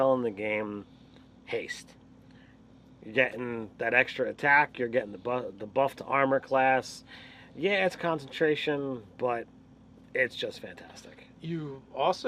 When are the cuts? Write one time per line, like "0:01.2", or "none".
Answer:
0:03.8